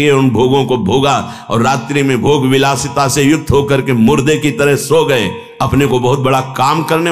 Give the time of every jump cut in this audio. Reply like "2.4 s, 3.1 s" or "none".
none